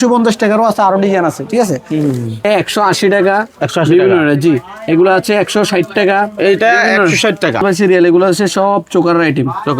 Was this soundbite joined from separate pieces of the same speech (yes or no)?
yes